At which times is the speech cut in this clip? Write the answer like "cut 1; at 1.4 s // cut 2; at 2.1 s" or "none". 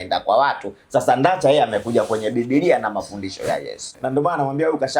cut 1; at 3.9 s

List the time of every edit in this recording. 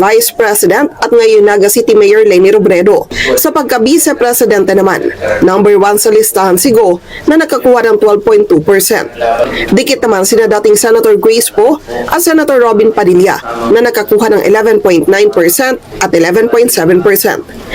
cut 1; at 3.1 s

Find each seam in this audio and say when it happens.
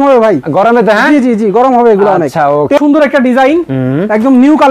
cut 1; at 2.8 s

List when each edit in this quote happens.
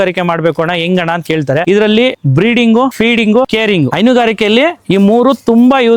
cut 1; at 1.6 s

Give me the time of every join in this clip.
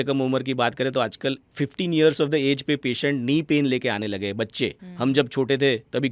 cut 1; at 1.5 s // cut 2; at 4.8 s

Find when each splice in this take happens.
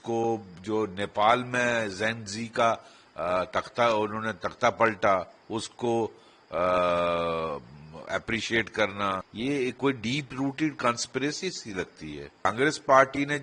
cut 1; at 9.3 s // cut 2; at 12.4 s

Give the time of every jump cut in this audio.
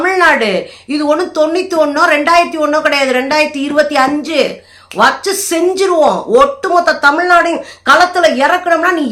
none

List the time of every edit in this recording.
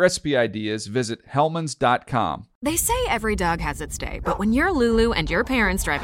cut 1; at 2.5 s

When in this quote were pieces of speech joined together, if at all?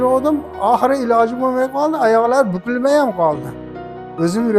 cut 1; at 3.6 s

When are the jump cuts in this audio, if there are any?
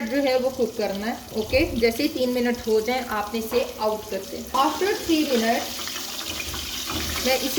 cut 1; at 4.5 s

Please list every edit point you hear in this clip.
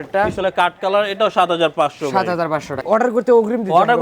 cut 1; at 2.7 s

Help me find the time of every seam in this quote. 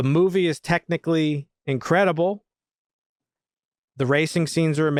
none

